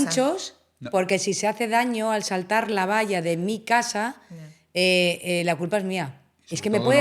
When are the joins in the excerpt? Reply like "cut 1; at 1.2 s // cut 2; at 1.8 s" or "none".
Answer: none